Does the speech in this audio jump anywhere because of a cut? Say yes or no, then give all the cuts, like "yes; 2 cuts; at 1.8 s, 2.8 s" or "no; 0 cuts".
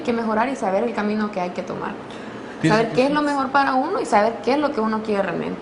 yes; 1 cut; at 2.7 s